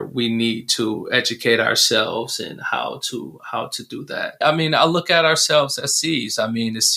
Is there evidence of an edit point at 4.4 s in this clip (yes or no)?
yes